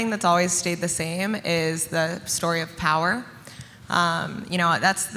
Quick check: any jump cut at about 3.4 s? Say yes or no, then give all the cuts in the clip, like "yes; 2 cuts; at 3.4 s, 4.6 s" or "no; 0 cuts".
no; 0 cuts